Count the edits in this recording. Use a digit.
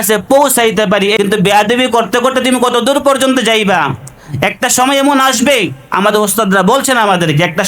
1